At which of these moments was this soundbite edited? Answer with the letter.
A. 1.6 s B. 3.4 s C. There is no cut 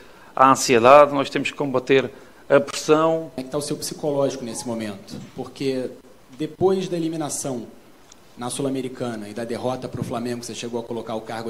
B